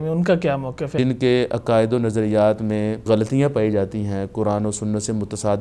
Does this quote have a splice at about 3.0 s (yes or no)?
yes